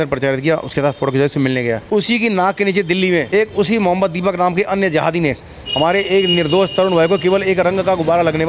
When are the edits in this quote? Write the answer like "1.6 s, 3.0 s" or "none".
1.8 s, 3.3 s